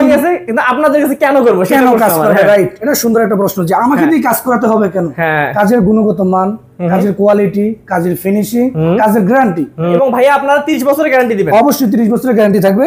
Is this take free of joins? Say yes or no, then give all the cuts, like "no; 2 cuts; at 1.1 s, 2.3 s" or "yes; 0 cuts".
no; 1 cut; at 9.9 s